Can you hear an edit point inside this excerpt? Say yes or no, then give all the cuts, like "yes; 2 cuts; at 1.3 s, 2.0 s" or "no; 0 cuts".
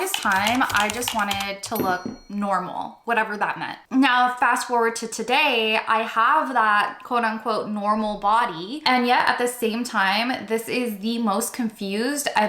yes; 2 cuts; at 3.8 s, 8.8 s